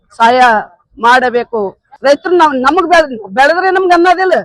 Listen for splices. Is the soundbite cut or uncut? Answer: cut